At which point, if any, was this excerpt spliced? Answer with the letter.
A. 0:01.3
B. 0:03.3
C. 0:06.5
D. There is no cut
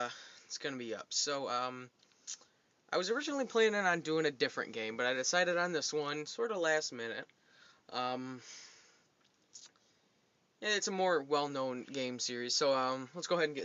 D